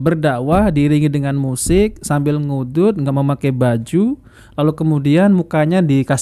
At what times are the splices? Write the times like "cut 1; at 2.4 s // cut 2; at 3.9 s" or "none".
none